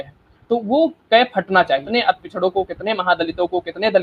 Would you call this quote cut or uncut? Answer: cut